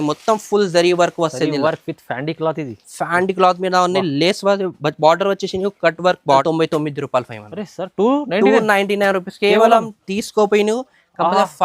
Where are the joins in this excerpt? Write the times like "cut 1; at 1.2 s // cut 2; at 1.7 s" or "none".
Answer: cut 1; at 6.4 s